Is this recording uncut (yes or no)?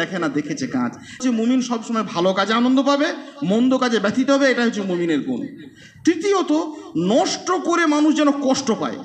no